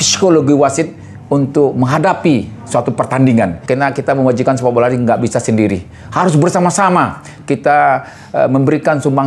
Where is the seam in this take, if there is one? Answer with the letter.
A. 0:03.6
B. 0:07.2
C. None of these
A